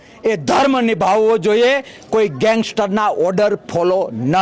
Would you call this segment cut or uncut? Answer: uncut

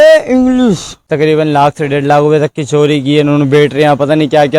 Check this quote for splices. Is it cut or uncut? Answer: cut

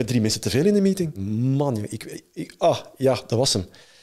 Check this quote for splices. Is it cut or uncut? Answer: cut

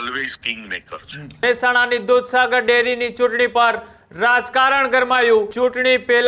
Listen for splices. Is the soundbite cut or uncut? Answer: cut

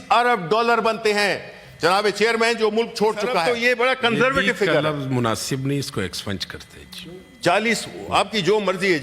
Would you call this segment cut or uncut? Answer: cut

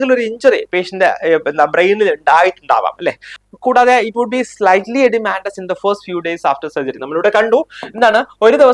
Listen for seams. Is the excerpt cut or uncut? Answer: cut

